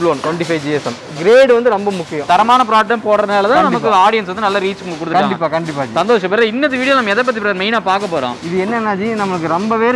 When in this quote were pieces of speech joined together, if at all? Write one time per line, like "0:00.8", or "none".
none